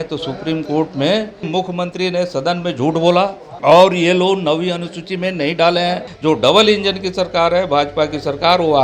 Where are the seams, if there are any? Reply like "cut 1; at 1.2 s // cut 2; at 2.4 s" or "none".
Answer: cut 1; at 1.5 s // cut 2; at 3.5 s // cut 3; at 6.1 s